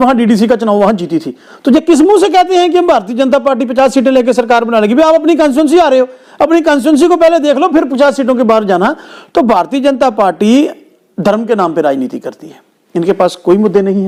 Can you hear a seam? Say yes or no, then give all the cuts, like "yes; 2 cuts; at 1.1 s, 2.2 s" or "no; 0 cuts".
no; 0 cuts